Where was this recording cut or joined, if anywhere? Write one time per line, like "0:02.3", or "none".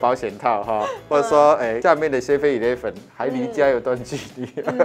0:01.8